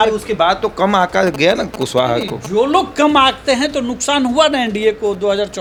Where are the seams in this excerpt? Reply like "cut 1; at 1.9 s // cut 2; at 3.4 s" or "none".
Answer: none